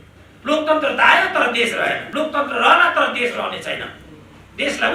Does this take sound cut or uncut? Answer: cut